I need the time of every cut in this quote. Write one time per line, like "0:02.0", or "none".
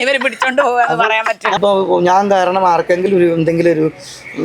0:01.6